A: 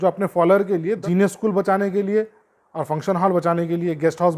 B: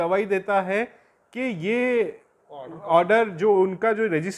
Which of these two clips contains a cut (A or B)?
A